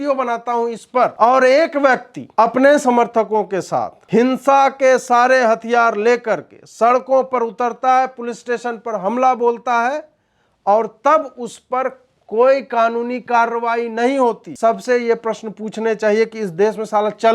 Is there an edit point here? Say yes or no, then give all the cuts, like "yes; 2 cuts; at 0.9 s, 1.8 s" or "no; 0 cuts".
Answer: yes; 4 cuts; at 1.1 s, 2.1 s, 4.0 s, 14.5 s